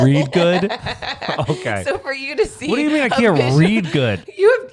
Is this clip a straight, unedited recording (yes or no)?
yes